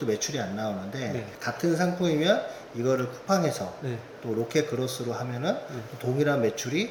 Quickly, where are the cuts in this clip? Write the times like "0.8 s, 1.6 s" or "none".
none